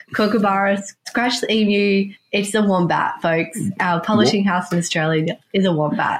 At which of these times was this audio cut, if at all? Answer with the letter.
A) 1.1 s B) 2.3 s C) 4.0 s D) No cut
A